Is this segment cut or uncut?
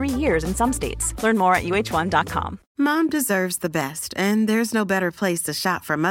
cut